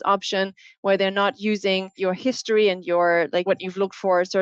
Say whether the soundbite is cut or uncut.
cut